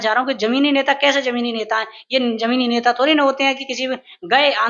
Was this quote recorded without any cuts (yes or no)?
yes